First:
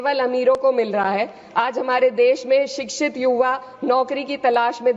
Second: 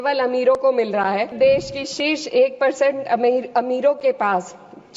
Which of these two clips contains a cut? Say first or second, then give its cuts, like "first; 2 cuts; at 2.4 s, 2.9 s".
second; 1 cut; at 1.3 s